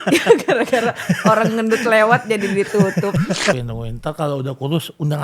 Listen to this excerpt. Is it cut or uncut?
cut